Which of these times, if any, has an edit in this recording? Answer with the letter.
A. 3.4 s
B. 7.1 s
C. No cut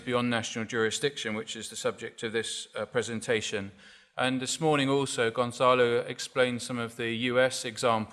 B